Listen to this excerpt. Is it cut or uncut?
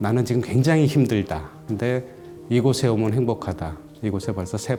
uncut